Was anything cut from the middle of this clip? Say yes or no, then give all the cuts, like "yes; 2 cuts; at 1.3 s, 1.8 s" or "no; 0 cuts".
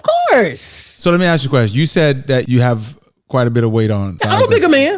yes; 2 cuts; at 2.5 s, 4.1 s